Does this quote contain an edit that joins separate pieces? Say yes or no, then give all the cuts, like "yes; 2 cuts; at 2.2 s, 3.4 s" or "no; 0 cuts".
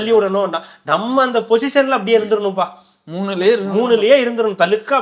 no; 0 cuts